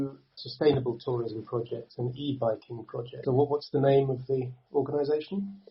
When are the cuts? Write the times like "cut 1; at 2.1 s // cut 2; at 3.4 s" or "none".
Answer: cut 1; at 3.2 s

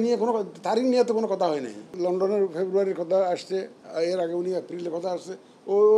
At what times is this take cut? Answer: cut 1; at 1.9 s

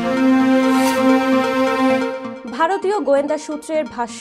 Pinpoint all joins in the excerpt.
cut 1; at 2.2 s

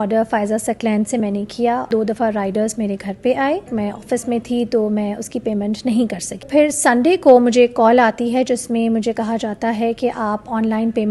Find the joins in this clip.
cut 1; at 1.9 s // cut 2; at 3.7 s // cut 3; at 6.4 s

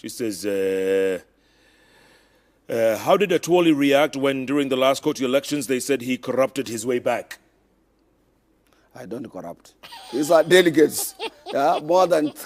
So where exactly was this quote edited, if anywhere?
cut 1; at 9.2 s

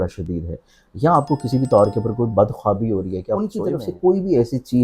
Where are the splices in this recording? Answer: cut 1; at 3.5 s

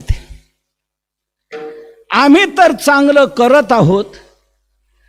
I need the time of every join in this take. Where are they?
none

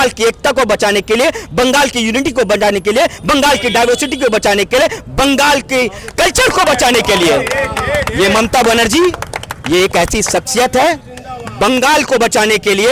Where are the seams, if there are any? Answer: none

